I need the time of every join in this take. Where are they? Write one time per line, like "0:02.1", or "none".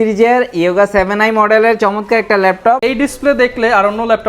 0:02.8